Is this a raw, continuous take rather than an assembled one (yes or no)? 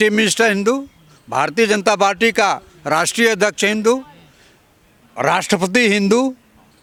yes